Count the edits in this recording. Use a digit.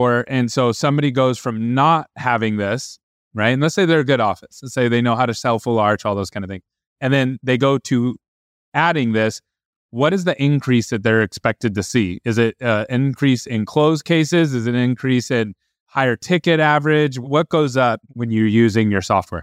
2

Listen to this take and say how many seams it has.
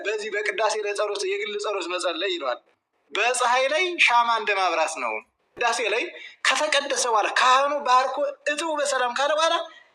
1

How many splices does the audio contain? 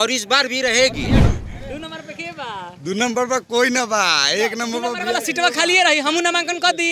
1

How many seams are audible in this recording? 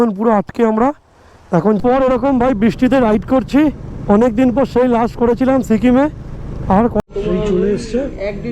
2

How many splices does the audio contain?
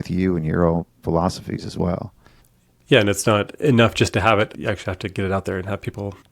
1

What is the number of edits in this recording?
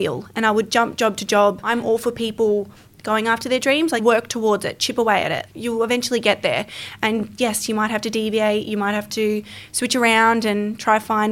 2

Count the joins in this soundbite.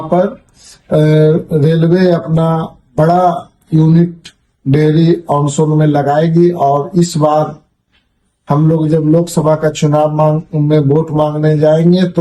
0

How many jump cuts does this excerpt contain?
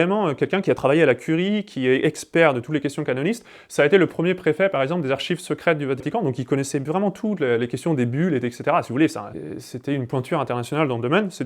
2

